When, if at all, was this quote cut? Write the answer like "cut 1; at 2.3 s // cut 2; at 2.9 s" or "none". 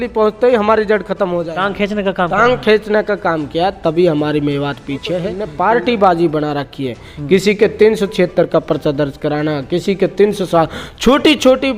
cut 1; at 5.4 s

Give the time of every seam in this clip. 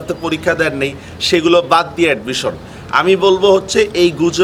none

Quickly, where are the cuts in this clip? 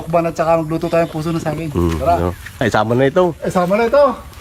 none

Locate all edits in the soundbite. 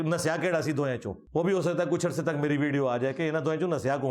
cut 1; at 1.2 s

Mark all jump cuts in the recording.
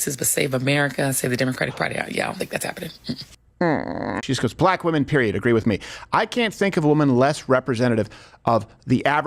cut 1; at 4.2 s

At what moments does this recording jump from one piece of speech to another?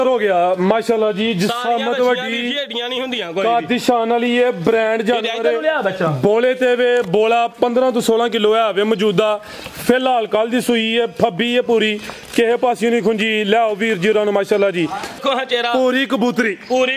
cut 1; at 15.2 s

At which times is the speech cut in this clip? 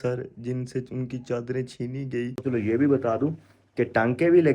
cut 1; at 2.4 s

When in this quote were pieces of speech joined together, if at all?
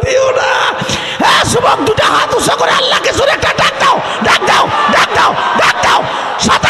none

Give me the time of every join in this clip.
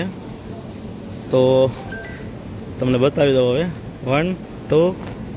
none

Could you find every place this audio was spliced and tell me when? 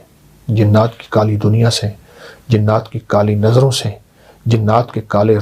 none

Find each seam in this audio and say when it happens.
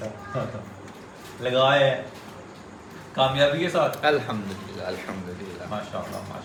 none

